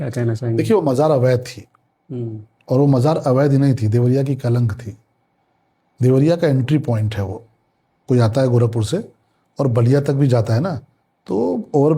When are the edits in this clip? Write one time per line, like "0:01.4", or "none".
none